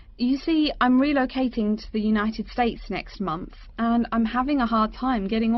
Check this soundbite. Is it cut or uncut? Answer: uncut